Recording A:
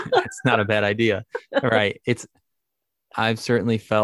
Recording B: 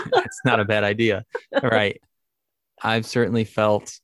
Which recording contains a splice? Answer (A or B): B